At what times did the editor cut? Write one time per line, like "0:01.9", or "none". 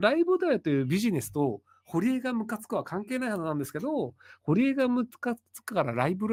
none